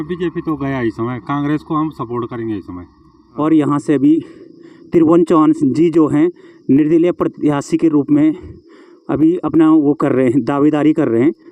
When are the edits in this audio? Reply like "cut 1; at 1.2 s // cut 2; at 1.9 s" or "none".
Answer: cut 1; at 3.2 s

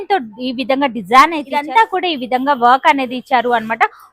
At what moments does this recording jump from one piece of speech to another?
cut 1; at 1.6 s

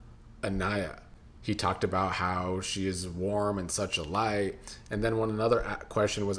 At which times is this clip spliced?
none

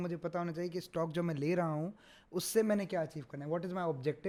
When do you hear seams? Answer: none

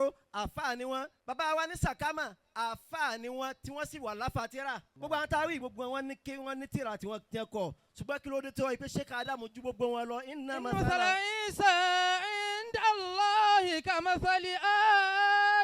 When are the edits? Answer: cut 1; at 1.1 s // cut 2; at 4.9 s

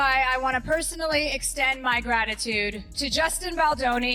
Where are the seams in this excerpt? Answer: cut 1; at 2.9 s

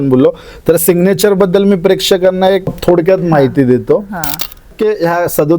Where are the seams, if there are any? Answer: cut 1; at 2.7 s // cut 2; at 4.7 s

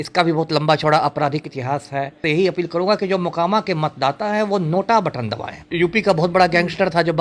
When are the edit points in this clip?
cut 1; at 2.2 s // cut 2; at 5.7 s

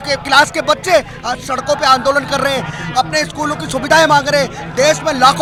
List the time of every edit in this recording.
none

